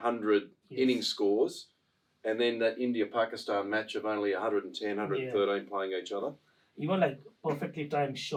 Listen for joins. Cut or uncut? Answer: uncut